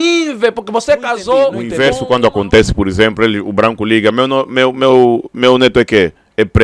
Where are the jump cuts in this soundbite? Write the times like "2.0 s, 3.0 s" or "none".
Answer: 1.6 s